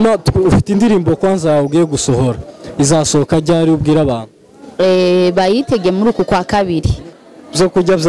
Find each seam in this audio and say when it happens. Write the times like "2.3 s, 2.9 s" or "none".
7.1 s